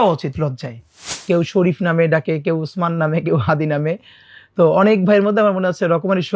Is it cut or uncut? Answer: cut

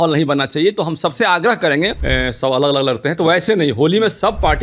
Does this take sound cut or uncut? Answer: cut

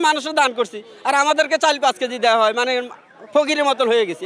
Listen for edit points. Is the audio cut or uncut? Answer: uncut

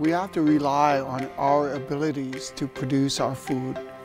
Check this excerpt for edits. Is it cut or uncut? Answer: uncut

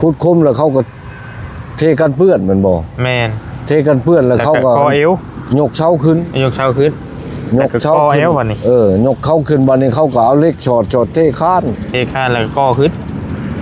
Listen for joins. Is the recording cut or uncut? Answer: uncut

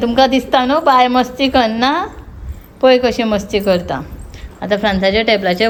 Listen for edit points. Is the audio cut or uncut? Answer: uncut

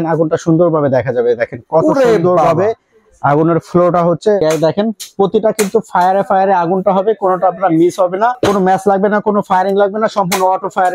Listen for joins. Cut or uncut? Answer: cut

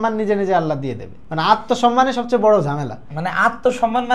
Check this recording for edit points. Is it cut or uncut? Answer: uncut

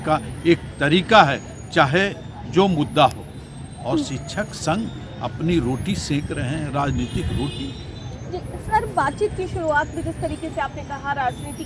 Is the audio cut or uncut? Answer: uncut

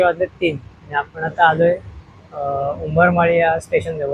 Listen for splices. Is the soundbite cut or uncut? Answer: uncut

